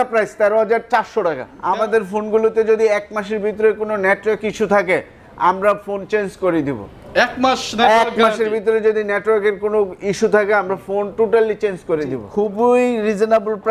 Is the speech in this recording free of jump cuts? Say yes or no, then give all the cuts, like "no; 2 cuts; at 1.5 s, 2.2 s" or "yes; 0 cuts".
no; 2 cuts; at 1.5 s, 12.2 s